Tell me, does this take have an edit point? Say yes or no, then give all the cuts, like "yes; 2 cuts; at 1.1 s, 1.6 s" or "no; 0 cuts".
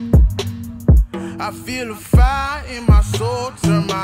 no; 0 cuts